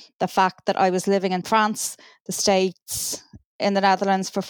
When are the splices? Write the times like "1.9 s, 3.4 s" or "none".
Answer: 1.4 s